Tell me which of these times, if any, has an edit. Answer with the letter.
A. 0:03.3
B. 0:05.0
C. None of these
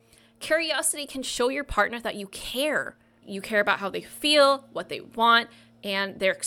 C